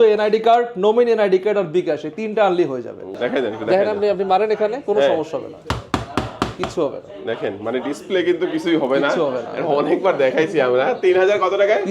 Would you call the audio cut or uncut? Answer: cut